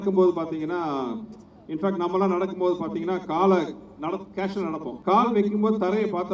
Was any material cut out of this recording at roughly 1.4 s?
no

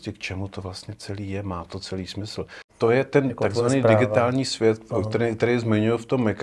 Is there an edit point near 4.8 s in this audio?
no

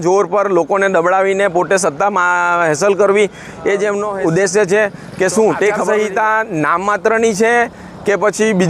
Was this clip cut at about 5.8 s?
yes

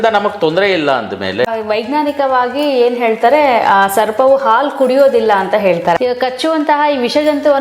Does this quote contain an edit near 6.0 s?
yes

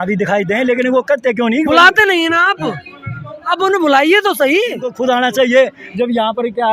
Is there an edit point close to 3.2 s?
no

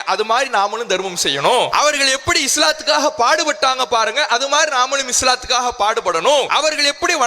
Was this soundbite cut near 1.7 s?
yes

